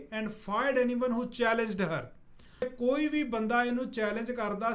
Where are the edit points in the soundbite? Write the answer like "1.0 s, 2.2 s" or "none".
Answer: 2.6 s